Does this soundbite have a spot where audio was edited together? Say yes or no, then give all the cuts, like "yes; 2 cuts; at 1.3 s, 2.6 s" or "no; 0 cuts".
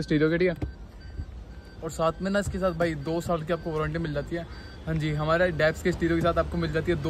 no; 0 cuts